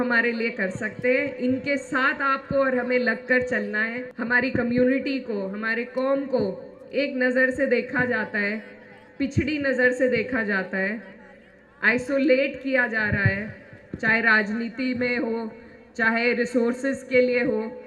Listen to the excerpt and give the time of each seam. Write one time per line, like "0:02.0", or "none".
0:04.1